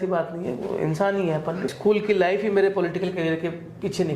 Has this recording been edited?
yes; 1 cut; at 1.7 s

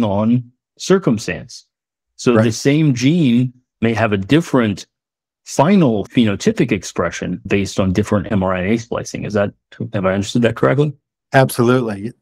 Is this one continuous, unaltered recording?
yes; 0 cuts

